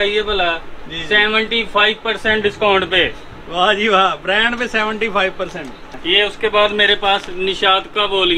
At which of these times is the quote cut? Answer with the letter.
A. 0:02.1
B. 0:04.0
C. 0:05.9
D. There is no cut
C